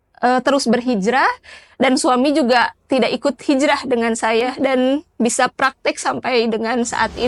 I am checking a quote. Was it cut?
no; 0 cuts

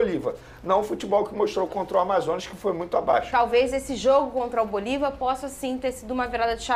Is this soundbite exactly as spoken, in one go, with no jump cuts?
yes; 0 cuts

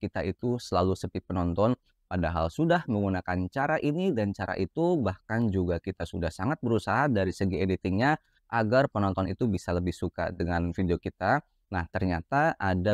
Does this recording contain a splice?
no; 0 cuts

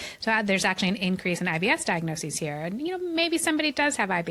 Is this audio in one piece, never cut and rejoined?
yes; 0 cuts

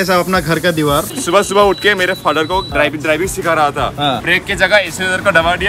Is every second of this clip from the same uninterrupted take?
no; 3 cuts; at 1.1 s, 2.7 s, 4.2 s

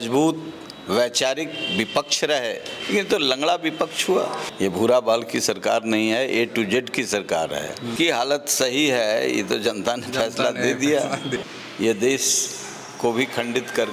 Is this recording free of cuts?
no; 4 cuts; at 2.7 s, 4.4 s, 7.9 s, 11.4 s

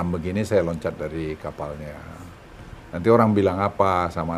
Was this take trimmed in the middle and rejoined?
no; 0 cuts

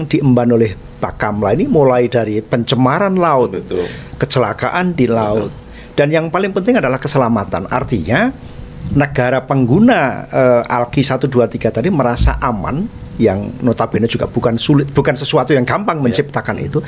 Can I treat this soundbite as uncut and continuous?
yes; 0 cuts

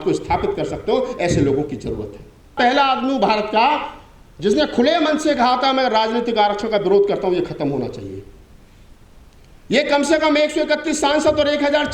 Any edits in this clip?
yes; 1 cut; at 2.5 s

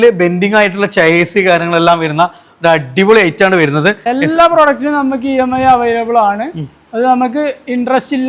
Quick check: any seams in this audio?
yes; 1 cut; at 4.0 s

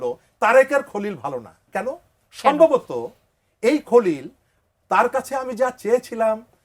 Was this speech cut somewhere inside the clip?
no; 0 cuts

